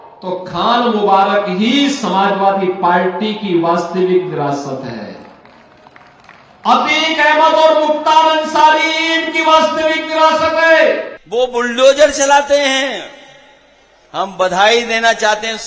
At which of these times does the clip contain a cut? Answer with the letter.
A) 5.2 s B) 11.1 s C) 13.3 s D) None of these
B